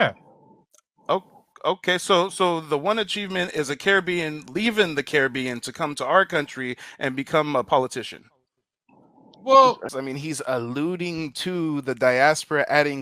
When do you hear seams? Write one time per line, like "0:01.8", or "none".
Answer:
0:10.0